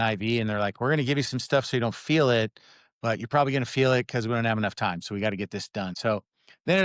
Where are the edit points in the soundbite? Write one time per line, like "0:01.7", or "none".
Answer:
0:05.9